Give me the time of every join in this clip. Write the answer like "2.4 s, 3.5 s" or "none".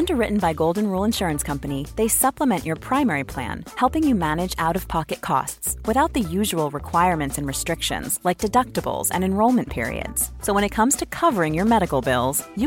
none